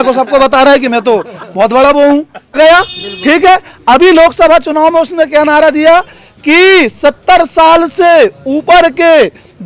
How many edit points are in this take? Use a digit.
1